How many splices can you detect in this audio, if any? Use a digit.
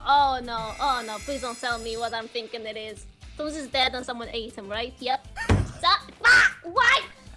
0